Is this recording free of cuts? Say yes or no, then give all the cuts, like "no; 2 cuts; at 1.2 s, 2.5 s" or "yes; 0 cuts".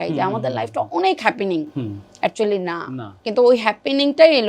no; 1 cut; at 3.0 s